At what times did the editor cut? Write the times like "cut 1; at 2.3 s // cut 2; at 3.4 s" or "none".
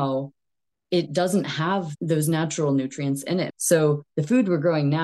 cut 1; at 1.9 s // cut 2; at 3.5 s